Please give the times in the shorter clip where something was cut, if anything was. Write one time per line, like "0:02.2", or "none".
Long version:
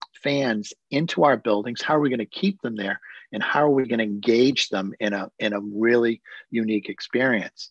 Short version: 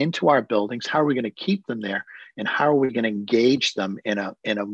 none